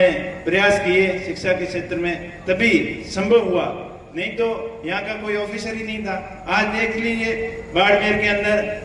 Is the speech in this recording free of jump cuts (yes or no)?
yes